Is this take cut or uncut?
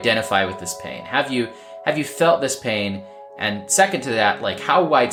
uncut